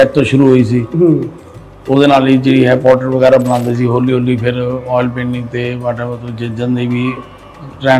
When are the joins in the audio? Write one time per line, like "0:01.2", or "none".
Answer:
none